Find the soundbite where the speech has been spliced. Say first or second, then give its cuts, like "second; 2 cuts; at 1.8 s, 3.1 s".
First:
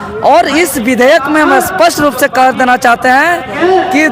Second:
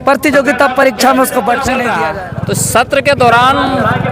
second; 1 cut; at 1.9 s